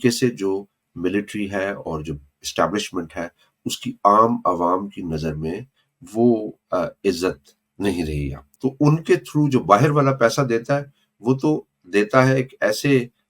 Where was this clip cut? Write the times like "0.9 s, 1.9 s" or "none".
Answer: 8.4 s

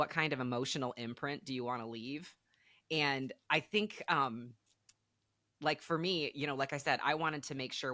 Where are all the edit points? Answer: none

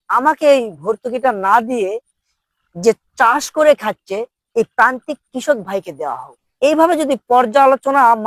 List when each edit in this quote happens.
none

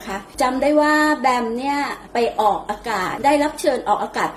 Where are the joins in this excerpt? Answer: 3.1 s

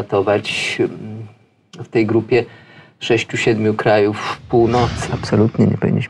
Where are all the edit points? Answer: 5.1 s

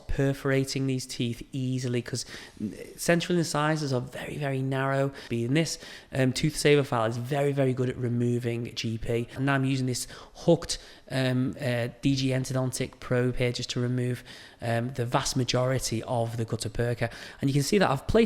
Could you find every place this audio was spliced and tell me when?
5.2 s, 9.4 s, 17.2 s

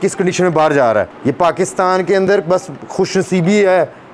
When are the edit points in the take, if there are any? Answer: 1.1 s

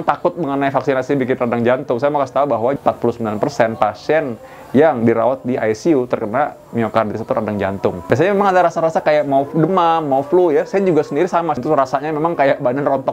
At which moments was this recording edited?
3.0 s, 8.0 s, 11.6 s

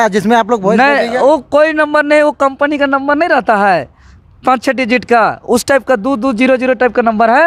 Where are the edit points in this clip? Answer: none

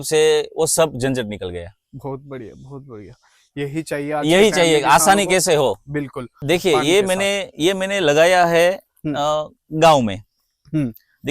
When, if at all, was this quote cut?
6.3 s

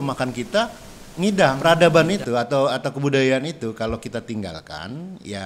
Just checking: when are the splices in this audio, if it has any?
1.6 s

